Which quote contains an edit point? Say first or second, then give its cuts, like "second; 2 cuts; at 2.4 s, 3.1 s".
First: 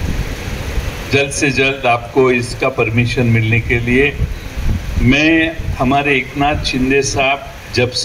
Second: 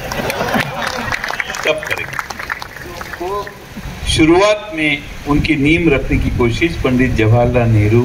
second; 1 cut; at 3.1 s